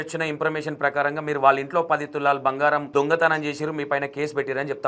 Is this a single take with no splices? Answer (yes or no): no